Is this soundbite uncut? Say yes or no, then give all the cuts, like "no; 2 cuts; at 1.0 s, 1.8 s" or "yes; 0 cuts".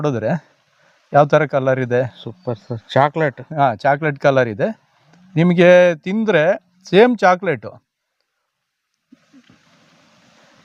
yes; 0 cuts